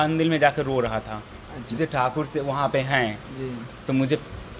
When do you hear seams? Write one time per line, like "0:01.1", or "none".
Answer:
0:01.8